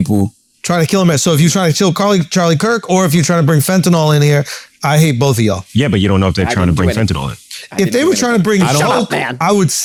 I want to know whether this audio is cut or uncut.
uncut